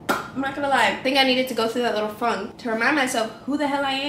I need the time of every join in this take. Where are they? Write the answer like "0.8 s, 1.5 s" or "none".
1.0 s, 2.5 s